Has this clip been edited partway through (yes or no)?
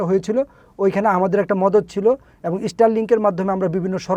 no